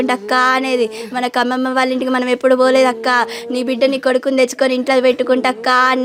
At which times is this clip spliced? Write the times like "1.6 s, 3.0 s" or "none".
none